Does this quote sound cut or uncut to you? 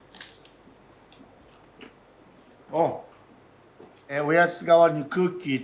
cut